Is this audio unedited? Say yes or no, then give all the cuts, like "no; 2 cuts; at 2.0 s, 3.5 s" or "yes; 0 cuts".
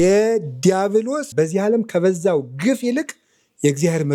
no; 1 cut; at 1.3 s